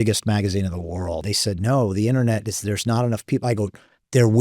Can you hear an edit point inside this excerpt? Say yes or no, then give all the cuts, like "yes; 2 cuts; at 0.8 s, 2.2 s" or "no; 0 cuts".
yes; 1 cut; at 1.2 s